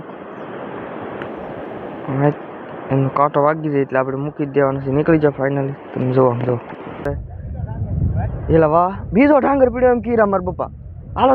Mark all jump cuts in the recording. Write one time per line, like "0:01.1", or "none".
0:07.1